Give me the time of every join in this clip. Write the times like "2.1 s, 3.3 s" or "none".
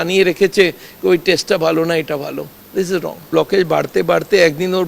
3.3 s